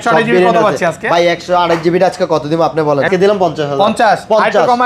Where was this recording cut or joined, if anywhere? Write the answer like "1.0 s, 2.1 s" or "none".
3.1 s